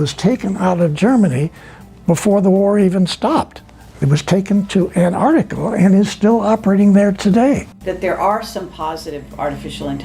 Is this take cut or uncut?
cut